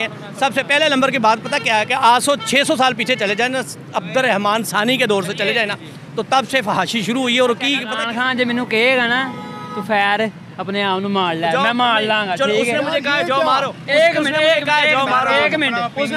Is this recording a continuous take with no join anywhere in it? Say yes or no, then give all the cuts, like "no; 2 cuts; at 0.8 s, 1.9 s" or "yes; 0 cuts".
no; 1 cut; at 8.0 s